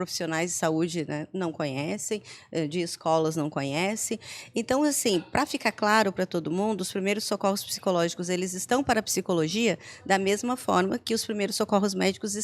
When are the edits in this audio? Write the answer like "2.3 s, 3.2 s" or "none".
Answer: none